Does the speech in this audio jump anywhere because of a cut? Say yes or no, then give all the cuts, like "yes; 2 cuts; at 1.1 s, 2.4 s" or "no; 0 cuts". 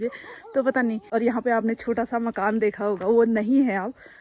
yes; 1 cut; at 1.0 s